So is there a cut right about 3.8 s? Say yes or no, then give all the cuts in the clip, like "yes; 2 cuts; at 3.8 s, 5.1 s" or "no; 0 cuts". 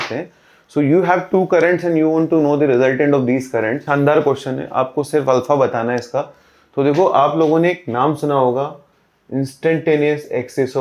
yes; 1 cut; at 3.8 s